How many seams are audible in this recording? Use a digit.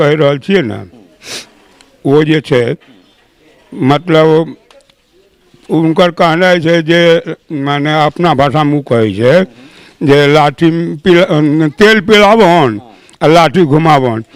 0